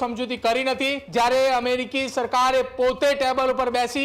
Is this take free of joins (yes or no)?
no